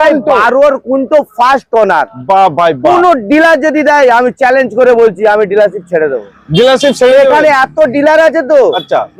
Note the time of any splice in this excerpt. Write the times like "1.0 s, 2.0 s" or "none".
none